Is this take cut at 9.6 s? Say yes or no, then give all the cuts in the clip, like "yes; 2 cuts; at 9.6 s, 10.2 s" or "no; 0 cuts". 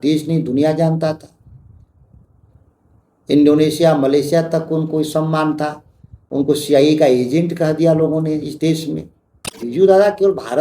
yes; 1 cut; at 9.6 s